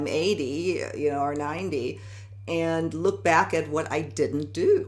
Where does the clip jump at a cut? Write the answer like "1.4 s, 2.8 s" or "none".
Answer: none